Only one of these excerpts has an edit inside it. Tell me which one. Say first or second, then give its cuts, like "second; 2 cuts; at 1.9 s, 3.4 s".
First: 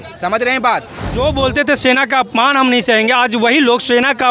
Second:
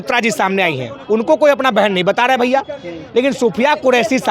first; 1 cut; at 1.0 s